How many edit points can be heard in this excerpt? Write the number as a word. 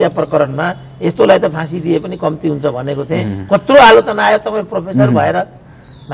zero